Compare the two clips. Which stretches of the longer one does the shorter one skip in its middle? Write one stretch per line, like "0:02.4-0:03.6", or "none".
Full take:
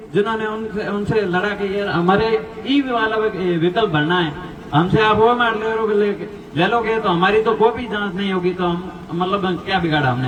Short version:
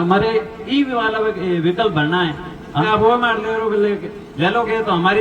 0:04.8-0:05.0